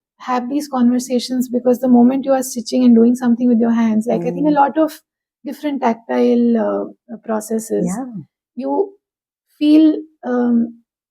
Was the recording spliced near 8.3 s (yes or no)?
no